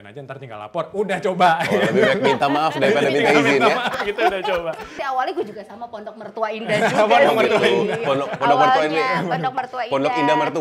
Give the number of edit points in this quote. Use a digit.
1